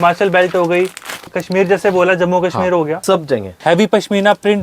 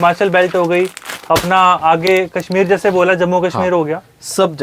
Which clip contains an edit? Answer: first; 2 cuts; at 1.2 s, 3.4 s

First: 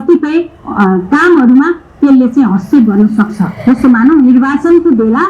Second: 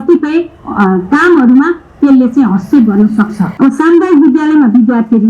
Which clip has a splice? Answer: second; 1 cut; at 3.4 s

